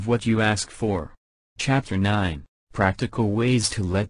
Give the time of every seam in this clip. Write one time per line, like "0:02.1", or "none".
0:01.2

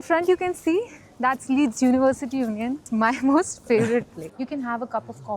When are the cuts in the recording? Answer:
0:02.8
0:04.3

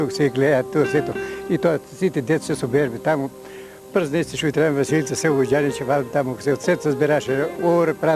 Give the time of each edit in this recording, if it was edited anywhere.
none

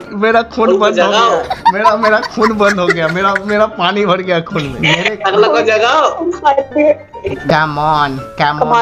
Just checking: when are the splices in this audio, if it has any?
0:07.4

